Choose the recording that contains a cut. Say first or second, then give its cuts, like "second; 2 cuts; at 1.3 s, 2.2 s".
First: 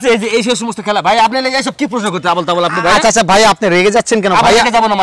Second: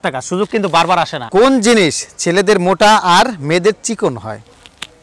second; 1 cut; at 1.2 s